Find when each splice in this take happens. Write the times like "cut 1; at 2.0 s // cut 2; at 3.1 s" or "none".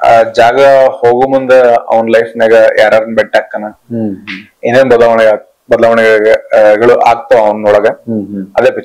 none

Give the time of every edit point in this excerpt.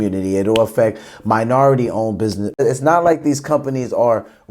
cut 1; at 2.6 s

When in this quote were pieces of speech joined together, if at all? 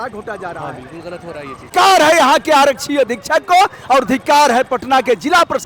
cut 1; at 1.7 s

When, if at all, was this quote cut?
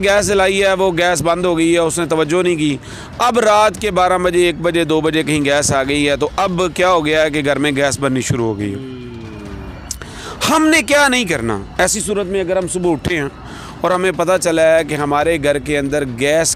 none

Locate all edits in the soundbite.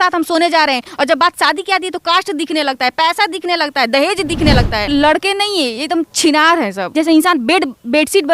cut 1; at 0.9 s // cut 2; at 4.9 s // cut 3; at 6.9 s

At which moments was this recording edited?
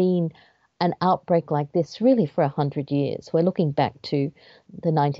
none

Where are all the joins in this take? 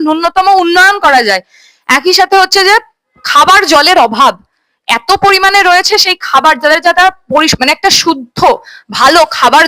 none

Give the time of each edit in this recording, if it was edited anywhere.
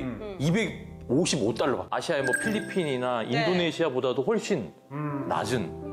cut 1; at 1.8 s

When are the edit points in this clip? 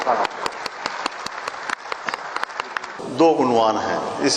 cut 1; at 3.0 s

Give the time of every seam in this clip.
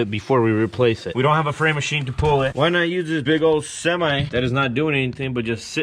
cut 1; at 1.1 s // cut 2; at 2.5 s

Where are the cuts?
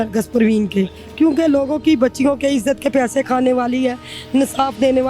cut 1; at 1.0 s

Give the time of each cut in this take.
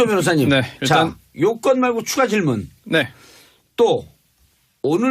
cut 1; at 4.1 s

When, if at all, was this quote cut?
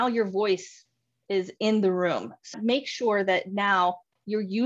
cut 1; at 2.5 s

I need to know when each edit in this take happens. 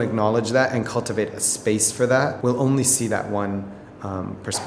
cut 1; at 2.4 s

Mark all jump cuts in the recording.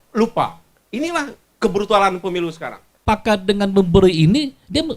cut 1; at 3.0 s

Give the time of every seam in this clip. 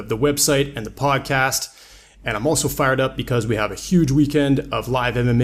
cut 1; at 2.4 s

